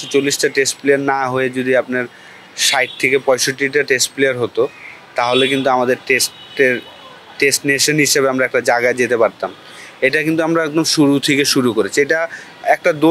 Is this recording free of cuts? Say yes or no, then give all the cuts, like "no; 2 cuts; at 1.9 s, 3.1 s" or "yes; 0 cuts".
yes; 0 cuts